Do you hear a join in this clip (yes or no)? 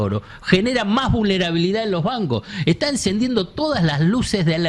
no